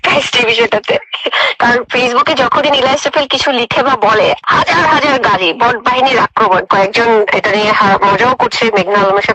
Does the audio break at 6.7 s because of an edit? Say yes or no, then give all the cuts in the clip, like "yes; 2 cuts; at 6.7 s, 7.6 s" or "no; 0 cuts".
yes; 2 cuts; at 4.4 s, 6.7 s